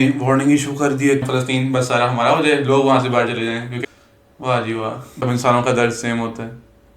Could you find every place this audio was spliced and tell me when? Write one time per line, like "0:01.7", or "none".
0:01.3
0:03.8
0:05.2